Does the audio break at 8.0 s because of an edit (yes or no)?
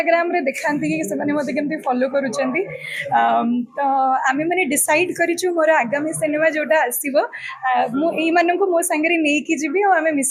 no